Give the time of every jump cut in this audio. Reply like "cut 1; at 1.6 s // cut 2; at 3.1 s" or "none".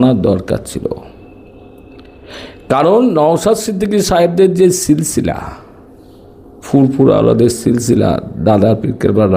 none